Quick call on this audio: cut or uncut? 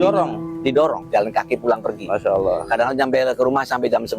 cut